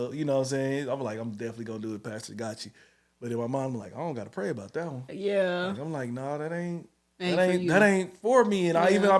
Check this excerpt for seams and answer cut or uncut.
uncut